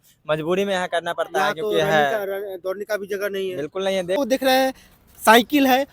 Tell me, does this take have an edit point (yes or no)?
yes